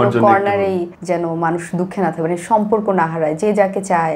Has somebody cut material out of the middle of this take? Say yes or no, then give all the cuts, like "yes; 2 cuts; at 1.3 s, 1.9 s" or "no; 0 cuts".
yes; 1 cut; at 0.9 s